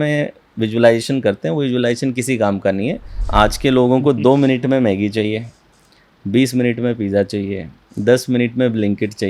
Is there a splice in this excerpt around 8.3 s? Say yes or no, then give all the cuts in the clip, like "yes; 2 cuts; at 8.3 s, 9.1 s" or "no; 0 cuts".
no; 1 cut; at 3.2 s